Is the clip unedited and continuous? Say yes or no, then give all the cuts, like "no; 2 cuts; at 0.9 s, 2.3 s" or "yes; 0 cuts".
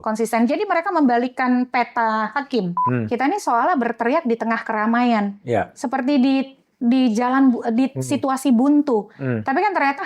no; 1 cut; at 2.8 s